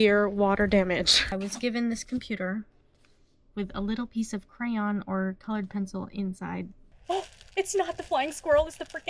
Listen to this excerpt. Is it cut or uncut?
cut